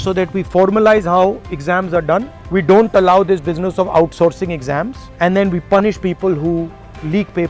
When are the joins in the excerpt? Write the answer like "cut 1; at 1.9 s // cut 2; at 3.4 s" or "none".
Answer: none